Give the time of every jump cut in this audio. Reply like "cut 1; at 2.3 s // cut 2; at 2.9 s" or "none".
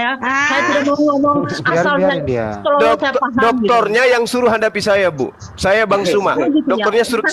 none